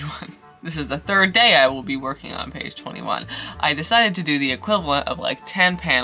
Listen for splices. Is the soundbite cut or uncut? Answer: uncut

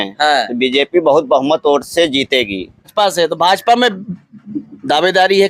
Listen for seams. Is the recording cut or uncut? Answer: cut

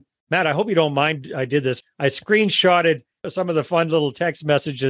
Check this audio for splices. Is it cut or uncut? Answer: cut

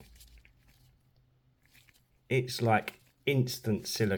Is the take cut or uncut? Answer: uncut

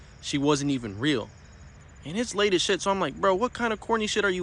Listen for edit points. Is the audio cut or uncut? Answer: uncut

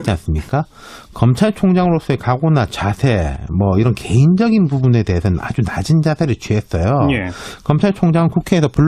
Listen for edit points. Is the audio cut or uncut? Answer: cut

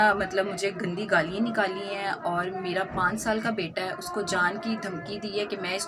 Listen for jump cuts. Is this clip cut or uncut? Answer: uncut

